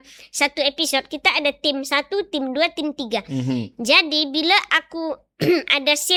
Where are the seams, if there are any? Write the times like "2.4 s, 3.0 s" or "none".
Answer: none